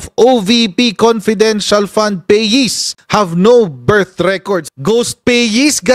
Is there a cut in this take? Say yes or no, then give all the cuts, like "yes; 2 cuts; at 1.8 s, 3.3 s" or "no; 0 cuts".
yes; 1 cut; at 4.7 s